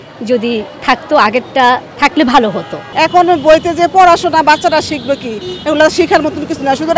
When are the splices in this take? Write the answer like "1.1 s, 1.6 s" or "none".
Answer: none